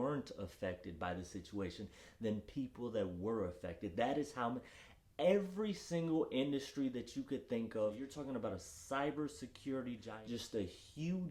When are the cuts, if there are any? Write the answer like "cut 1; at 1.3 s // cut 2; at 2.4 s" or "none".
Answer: cut 1; at 8.1 s // cut 2; at 10.1 s